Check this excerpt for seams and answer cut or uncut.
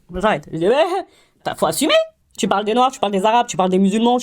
uncut